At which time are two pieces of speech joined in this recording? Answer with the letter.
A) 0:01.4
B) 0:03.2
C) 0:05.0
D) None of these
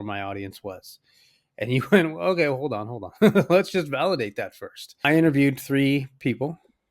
C